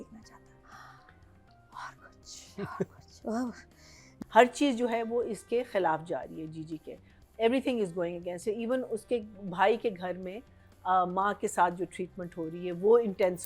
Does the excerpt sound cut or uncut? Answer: cut